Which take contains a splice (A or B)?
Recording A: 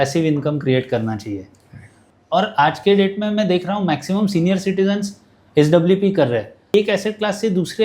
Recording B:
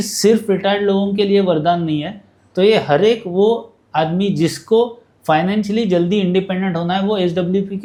A